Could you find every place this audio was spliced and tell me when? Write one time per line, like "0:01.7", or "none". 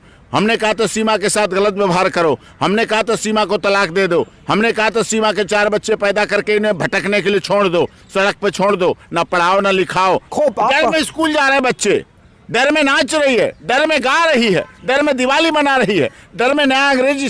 0:10.3